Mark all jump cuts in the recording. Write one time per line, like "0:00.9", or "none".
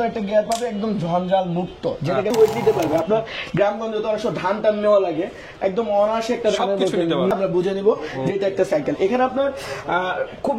0:02.3
0:07.3